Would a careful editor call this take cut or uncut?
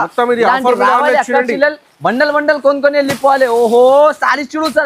uncut